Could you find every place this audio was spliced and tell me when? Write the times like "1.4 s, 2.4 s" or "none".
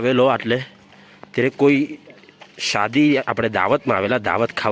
none